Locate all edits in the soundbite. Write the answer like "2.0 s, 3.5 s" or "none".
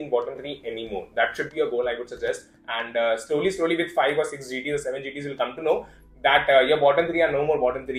none